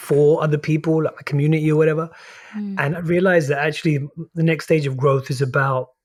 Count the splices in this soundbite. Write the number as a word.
zero